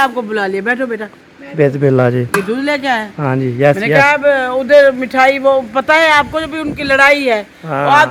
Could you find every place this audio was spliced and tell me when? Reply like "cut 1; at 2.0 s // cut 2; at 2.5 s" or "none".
none